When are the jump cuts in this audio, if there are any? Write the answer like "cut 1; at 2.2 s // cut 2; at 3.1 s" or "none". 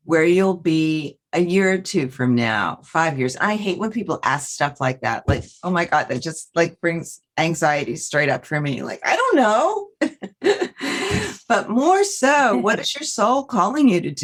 none